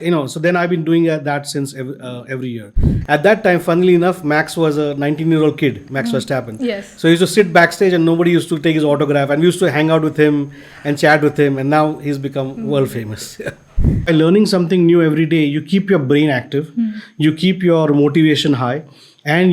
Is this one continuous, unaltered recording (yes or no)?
no